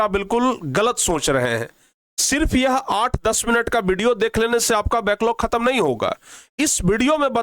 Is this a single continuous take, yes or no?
yes